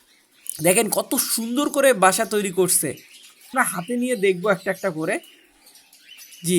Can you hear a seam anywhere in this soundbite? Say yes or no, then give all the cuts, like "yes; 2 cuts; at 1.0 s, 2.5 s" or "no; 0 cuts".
yes; 1 cut; at 3.5 s